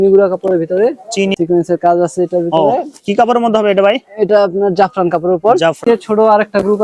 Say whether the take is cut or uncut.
cut